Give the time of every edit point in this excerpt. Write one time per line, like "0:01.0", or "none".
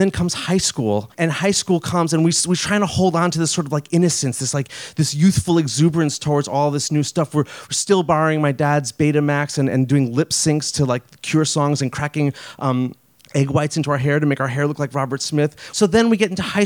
0:01.1
0:15.6